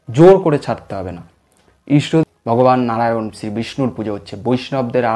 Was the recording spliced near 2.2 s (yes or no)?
yes